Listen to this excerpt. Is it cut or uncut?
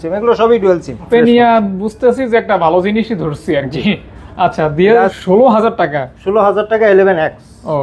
cut